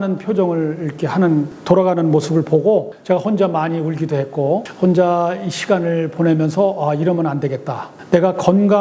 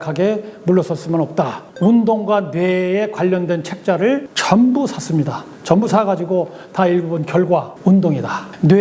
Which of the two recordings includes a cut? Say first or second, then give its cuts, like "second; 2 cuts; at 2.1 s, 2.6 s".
second; 1 cut; at 1.7 s